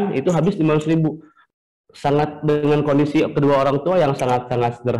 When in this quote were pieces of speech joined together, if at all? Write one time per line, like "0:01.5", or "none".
0:01.3